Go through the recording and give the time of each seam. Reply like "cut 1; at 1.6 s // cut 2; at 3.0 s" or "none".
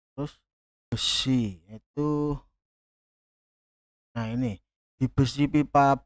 cut 1; at 0.9 s